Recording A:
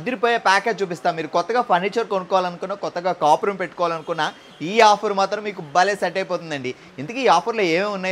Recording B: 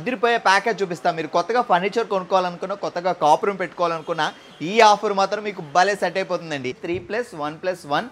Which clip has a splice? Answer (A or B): B